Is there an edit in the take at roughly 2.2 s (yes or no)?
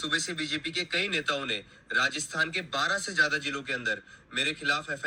no